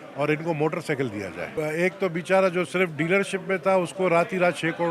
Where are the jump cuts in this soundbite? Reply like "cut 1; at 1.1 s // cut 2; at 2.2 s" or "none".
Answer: cut 1; at 1.5 s